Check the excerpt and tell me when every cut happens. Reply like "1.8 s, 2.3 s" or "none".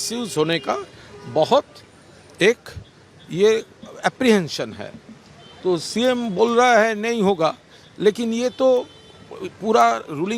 none